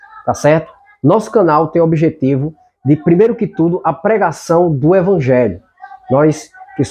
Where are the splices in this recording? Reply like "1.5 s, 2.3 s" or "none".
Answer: none